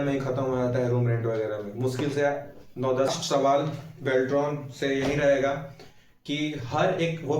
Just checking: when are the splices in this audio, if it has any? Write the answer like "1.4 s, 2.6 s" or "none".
3.1 s